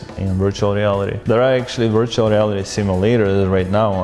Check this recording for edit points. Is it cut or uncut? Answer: cut